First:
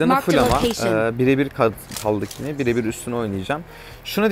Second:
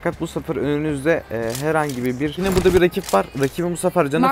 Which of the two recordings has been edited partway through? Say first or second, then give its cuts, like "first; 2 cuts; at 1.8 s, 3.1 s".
second; 1 cut; at 2.3 s